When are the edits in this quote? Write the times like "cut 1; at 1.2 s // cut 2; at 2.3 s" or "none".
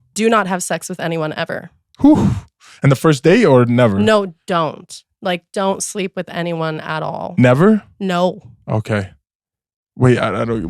none